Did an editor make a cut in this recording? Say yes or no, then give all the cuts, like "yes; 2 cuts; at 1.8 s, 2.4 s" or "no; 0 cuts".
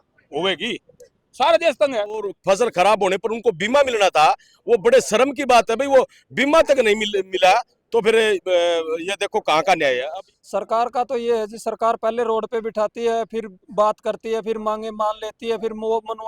yes; 2 cuts; at 2.3 s, 10.1 s